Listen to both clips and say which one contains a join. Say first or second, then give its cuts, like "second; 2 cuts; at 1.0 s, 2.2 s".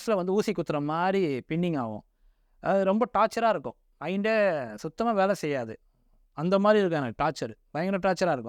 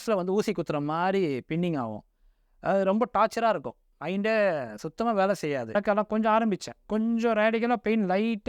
second; 1 cut; at 5.7 s